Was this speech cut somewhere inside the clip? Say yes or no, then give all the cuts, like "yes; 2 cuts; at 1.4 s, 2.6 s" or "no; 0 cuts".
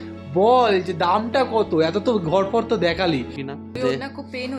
yes; 1 cut; at 3.4 s